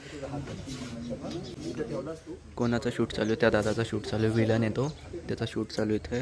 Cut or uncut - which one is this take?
uncut